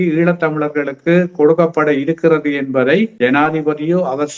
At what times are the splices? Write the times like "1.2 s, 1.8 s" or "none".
3.1 s